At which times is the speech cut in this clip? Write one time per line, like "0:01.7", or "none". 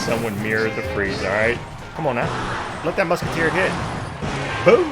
0:01.9